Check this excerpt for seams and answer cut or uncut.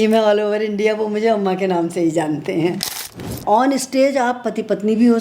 cut